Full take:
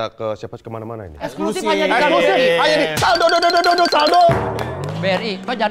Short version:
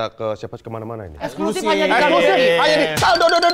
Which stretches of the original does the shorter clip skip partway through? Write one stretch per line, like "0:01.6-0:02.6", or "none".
none